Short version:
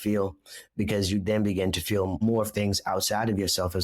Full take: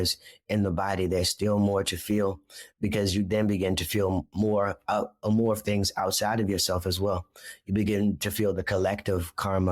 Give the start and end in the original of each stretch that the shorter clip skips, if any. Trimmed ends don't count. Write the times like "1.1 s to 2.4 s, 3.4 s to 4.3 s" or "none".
4.2 s to 5.3 s